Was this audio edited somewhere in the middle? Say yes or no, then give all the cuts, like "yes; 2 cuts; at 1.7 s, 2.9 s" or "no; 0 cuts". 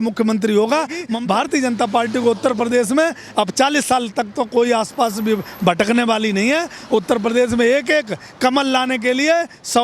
yes; 1 cut; at 1.1 s